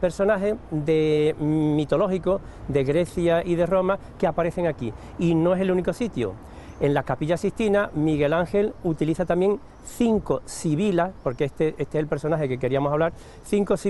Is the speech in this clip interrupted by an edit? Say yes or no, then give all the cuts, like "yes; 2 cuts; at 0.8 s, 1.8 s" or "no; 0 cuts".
no; 0 cuts